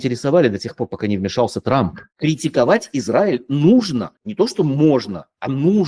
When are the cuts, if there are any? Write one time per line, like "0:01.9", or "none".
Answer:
0:02.0